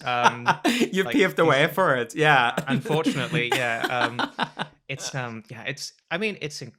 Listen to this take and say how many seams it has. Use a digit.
0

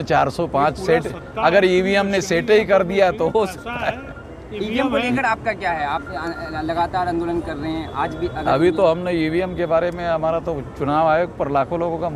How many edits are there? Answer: 0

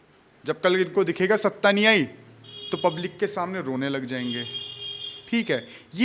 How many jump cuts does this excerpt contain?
0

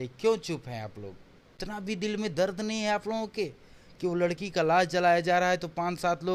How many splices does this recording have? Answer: 1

